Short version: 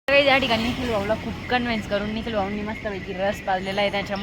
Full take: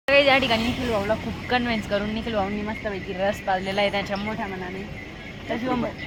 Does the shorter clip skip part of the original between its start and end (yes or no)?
no